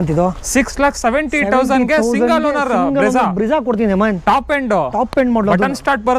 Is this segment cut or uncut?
uncut